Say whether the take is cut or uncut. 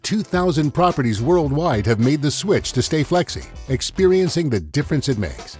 uncut